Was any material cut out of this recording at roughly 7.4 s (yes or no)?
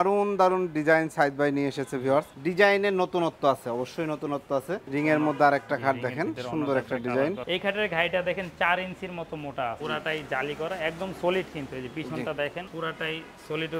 yes